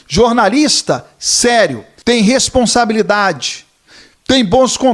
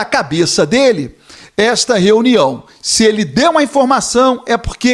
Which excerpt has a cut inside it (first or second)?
first